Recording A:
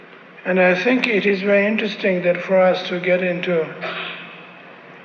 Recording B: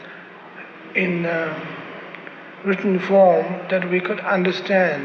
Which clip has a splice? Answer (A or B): A